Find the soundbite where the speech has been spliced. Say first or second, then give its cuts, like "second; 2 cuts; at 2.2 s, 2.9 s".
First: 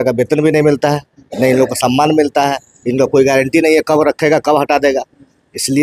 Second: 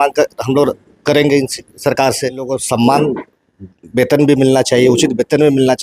second; 1 cut; at 2.6 s